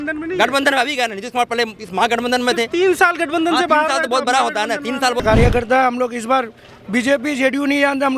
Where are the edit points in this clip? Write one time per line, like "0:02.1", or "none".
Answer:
0:05.2